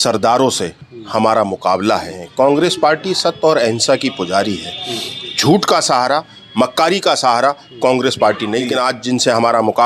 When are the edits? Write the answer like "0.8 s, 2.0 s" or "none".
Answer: 2.2 s, 8.7 s